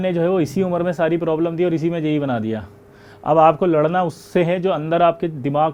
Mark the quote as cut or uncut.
uncut